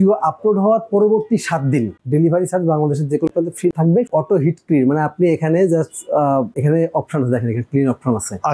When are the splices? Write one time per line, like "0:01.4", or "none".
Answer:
0:04.1